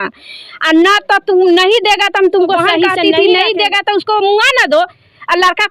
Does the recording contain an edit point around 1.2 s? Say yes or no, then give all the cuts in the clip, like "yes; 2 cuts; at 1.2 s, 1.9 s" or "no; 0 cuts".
no; 1 cut; at 3.0 s